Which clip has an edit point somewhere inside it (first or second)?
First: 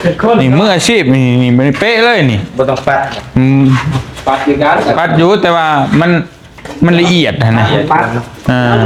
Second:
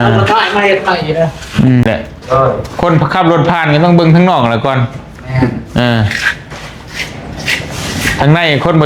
second